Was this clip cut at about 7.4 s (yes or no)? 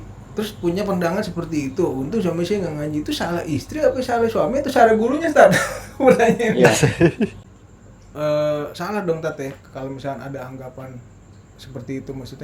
yes